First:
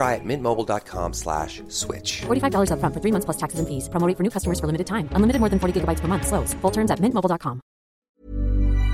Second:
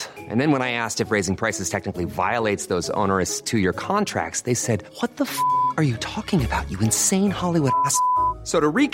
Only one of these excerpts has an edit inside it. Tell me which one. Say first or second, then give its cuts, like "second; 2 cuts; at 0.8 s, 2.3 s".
first; 1 cut; at 8.0 s